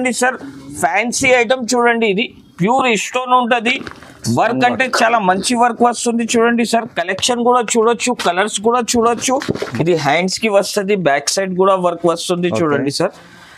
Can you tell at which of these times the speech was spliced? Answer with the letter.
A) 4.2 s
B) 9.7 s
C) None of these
B